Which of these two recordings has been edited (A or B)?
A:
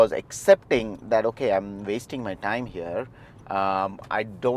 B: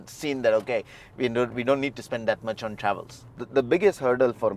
B